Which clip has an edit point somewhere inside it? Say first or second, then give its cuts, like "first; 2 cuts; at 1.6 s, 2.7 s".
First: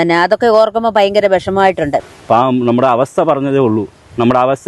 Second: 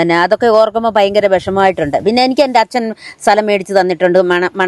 first; 1 cut; at 2.0 s